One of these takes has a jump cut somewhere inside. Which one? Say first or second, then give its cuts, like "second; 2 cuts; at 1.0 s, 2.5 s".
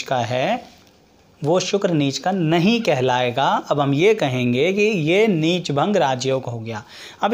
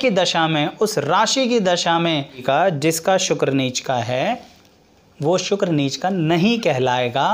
second; 1 cut; at 2.4 s